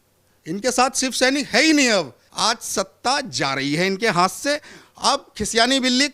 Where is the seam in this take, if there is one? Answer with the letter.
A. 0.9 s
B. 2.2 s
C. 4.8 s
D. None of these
B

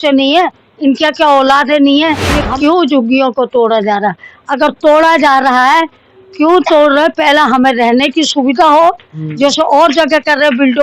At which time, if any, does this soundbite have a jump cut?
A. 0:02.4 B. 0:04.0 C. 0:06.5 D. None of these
A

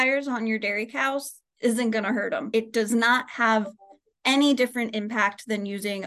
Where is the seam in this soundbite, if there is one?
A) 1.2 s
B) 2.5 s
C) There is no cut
B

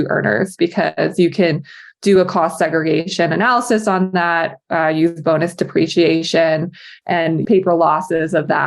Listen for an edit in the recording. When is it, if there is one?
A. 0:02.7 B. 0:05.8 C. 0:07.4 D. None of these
C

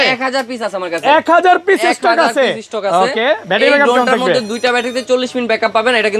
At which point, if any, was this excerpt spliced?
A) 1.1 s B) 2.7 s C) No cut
C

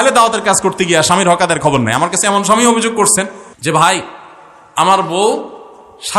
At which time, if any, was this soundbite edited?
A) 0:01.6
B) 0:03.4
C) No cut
B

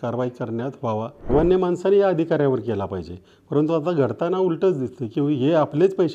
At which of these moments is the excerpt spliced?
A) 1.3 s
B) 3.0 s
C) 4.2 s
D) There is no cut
A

